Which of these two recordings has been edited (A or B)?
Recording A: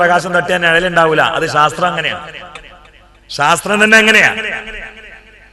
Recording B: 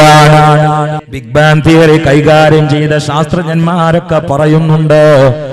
B